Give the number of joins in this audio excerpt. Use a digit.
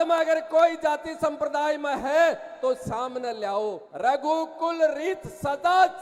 1